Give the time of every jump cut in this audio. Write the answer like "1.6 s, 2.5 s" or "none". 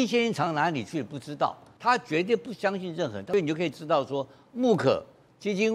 1.7 s, 3.2 s